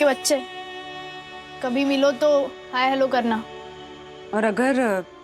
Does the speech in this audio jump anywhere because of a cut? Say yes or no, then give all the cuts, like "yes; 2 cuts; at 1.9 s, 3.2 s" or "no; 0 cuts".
no; 0 cuts